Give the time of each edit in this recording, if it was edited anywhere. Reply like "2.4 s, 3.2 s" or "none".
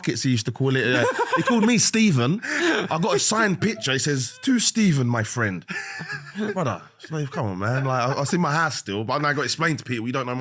none